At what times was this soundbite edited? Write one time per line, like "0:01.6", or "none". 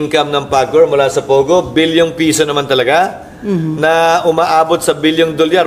none